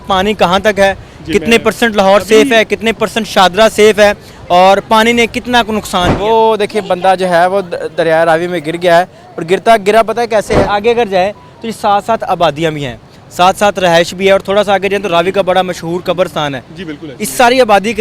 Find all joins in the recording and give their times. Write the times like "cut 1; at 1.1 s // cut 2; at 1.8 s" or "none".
cut 1; at 6.1 s // cut 2; at 10.7 s

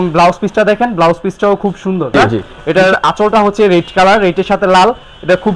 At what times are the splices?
cut 1; at 2.1 s

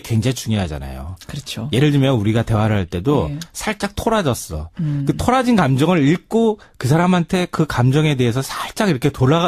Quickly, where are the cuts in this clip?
none

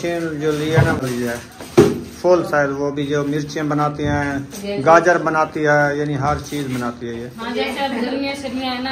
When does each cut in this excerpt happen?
cut 1; at 1.0 s

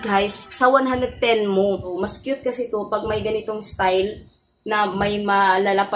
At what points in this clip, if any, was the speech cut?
cut 1; at 2.0 s

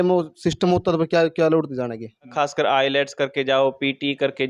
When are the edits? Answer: cut 1; at 2.3 s

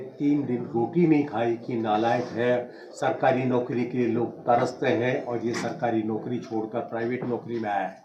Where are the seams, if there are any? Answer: none

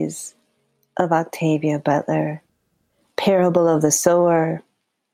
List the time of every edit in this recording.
none

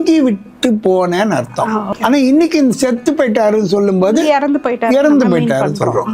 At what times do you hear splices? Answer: cut 1; at 1.9 s

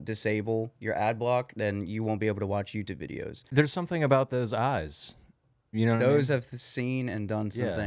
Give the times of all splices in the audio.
cut 1; at 3.4 s

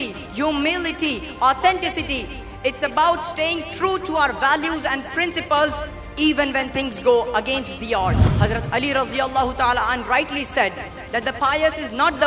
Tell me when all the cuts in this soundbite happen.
cut 1; at 8.3 s

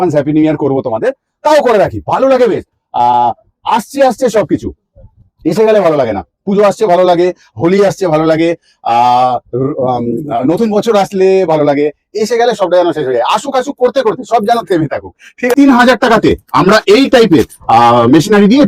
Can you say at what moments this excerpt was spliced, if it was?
cut 1; at 15.6 s

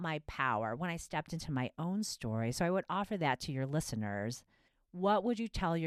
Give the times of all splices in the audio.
none

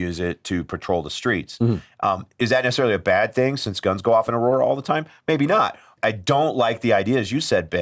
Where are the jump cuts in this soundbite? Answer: cut 1; at 5.9 s

